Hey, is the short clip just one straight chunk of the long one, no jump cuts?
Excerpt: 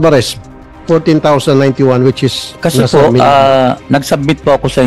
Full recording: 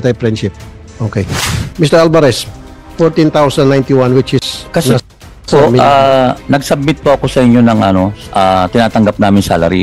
no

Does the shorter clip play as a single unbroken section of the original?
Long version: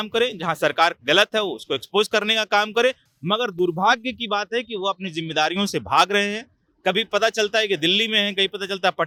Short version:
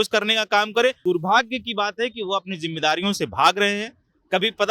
no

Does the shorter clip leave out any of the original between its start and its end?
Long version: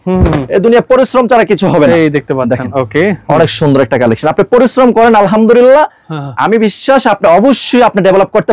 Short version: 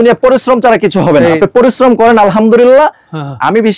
yes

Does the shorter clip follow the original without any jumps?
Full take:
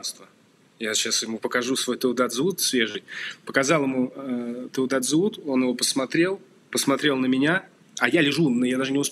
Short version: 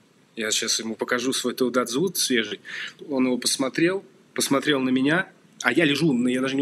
no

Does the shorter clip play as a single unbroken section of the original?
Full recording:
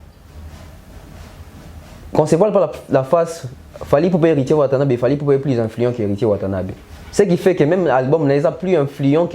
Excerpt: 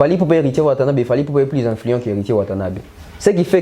yes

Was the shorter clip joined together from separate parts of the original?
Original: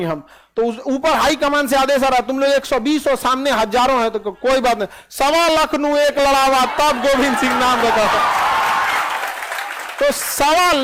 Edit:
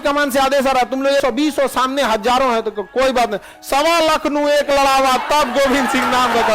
yes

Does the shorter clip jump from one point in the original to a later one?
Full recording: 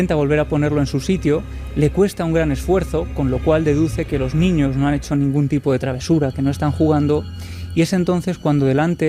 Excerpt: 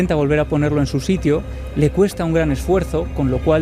no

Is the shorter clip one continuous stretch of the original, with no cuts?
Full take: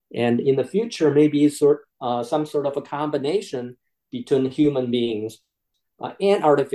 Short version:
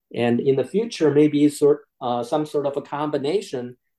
yes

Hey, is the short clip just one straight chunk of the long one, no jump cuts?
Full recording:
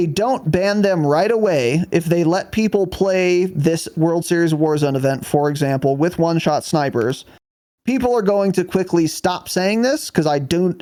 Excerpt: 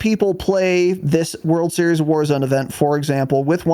yes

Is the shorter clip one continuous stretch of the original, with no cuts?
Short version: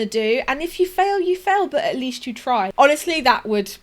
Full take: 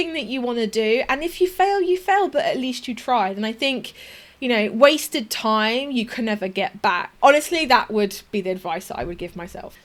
no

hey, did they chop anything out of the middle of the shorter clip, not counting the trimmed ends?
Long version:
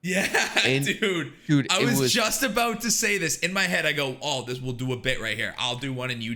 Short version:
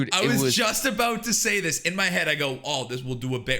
no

